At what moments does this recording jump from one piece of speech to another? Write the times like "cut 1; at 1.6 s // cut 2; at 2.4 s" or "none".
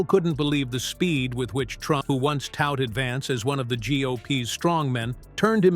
cut 1; at 2.0 s

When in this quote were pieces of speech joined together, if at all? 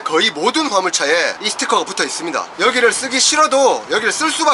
cut 1; at 2.5 s

